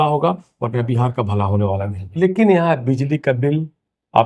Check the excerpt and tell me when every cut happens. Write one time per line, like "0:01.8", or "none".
0:02.0